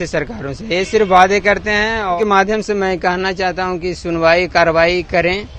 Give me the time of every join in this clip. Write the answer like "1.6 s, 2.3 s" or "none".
2.2 s